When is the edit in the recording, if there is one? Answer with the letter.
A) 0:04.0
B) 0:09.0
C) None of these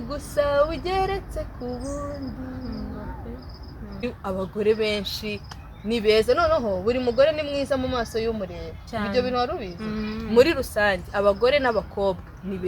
A